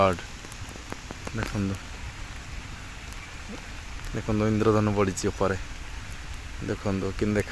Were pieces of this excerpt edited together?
no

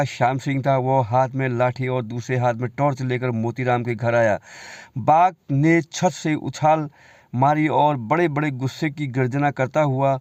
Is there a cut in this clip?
no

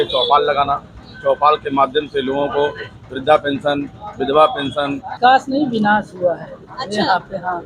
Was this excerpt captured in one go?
no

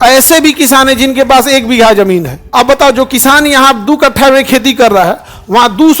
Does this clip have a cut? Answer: yes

